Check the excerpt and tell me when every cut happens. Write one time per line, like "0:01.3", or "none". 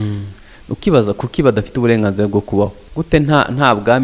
0:02.8